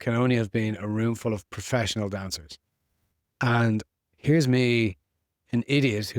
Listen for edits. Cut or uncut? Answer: uncut